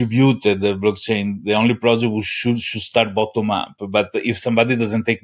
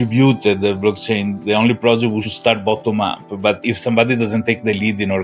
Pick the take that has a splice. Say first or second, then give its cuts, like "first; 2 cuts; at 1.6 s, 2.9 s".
second; 2 cuts; at 2.3 s, 3.6 s